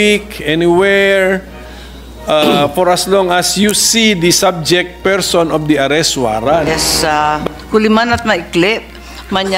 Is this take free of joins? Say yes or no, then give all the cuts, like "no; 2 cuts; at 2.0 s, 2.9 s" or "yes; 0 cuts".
no; 1 cut; at 6.7 s